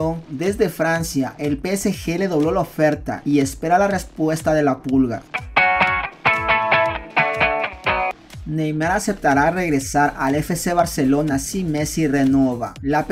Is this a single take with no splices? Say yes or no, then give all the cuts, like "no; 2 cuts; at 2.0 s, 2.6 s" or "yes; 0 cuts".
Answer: no; 2 cuts; at 5.3 s, 8.2 s